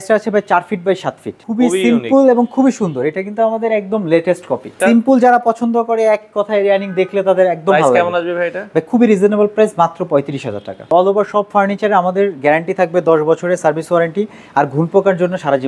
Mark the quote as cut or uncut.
cut